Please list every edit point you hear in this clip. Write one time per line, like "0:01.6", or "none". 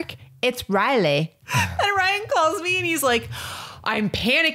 0:01.4

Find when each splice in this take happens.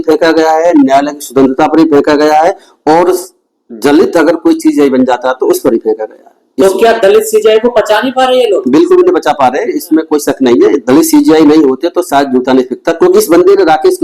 none

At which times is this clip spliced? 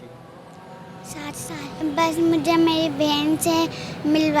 0:01.8

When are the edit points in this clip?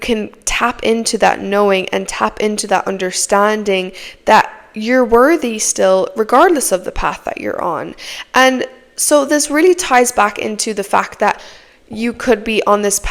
none

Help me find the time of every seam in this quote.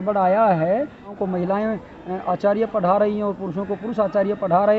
0:01.1

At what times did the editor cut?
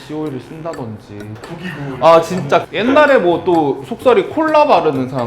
0:01.4
0:02.7

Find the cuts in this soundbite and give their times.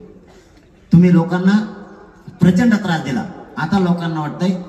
none

